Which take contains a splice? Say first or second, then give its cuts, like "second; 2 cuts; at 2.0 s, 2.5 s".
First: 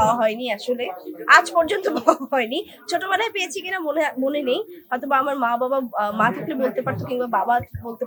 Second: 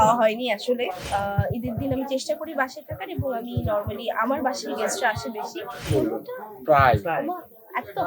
second; 2 cuts; at 1.0 s, 5.8 s